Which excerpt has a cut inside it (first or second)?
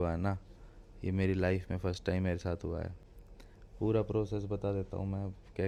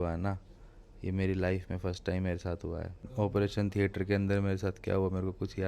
second